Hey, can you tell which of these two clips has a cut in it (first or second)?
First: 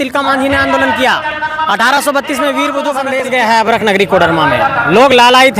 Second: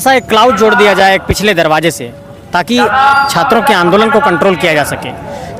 first